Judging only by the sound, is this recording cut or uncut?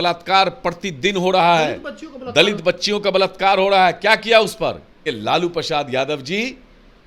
cut